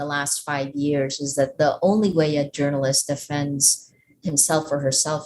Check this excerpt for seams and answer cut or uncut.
uncut